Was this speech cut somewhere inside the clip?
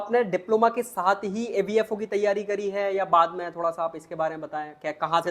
no; 0 cuts

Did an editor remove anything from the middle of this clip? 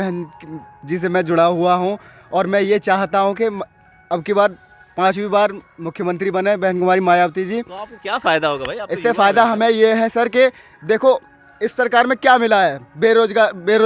no; 0 cuts

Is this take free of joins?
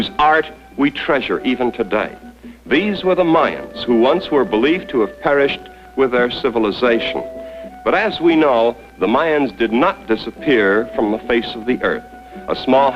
yes; 0 cuts

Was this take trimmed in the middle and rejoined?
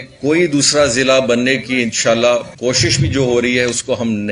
yes; 1 cut; at 2.5 s

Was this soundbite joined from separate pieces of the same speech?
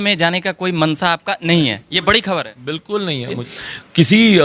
yes; 1 cut; at 3.5 s

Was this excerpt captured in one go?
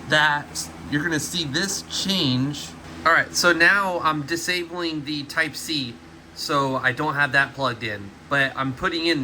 no; 2 cuts; at 2.9 s, 8.1 s

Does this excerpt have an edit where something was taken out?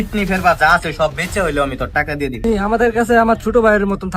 yes; 1 cut; at 2.4 s

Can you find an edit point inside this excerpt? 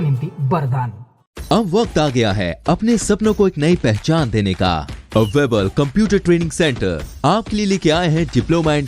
no; 0 cuts

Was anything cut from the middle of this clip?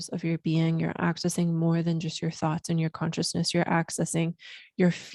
no; 0 cuts

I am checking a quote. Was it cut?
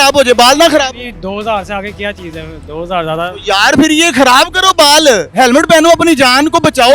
no; 0 cuts

